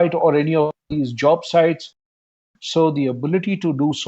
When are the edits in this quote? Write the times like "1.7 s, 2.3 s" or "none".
2.4 s